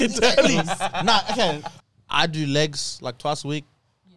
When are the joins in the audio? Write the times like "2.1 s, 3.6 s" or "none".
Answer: 1.7 s